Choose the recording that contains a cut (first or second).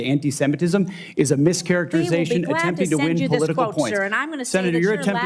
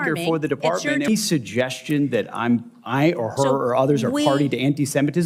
second